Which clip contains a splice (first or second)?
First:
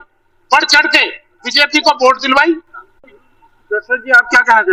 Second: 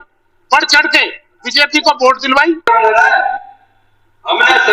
second